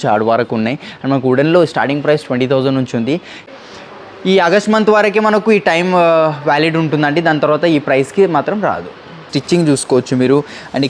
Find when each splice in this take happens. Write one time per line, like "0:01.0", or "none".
0:03.5
0:09.3